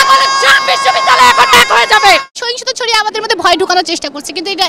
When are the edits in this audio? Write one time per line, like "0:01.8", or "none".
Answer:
0:02.3

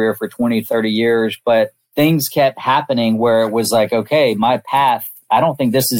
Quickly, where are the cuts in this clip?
0:01.8

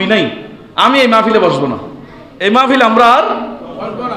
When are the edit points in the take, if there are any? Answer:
0:02.6

